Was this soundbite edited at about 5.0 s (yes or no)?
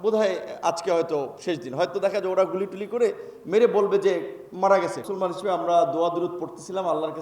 yes